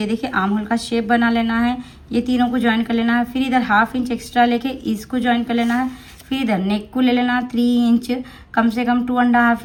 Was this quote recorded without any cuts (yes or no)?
yes